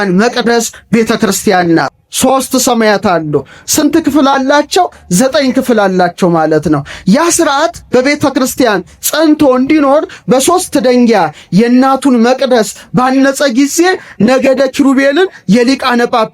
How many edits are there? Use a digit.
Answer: 1